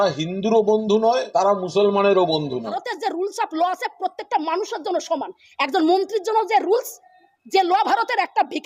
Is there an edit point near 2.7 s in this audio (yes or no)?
yes